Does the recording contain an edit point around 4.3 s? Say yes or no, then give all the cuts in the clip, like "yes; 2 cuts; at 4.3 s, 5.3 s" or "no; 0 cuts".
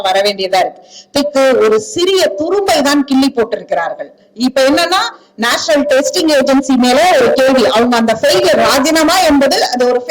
no; 1 cut; at 1.2 s